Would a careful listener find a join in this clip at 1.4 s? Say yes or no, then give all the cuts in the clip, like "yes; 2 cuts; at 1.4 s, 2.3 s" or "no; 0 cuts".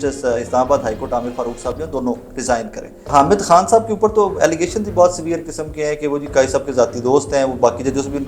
no; 1 cut; at 3.1 s